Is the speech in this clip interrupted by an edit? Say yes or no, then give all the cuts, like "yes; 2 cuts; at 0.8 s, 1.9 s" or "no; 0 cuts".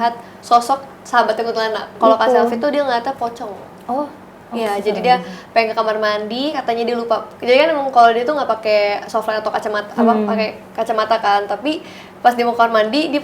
yes; 1 cut; at 1.9 s